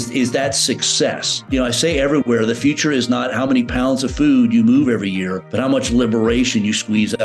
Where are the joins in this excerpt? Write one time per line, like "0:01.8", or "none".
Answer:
0:01.5
0:05.4